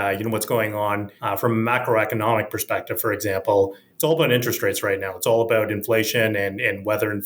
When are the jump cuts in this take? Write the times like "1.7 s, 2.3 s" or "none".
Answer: 1.1 s